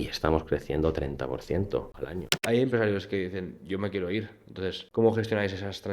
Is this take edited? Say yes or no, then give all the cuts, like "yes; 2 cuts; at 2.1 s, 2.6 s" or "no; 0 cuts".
yes; 2 cuts; at 2.4 s, 4.8 s